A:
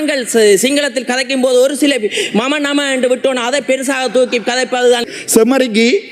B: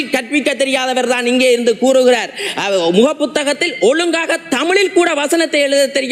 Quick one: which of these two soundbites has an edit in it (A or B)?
A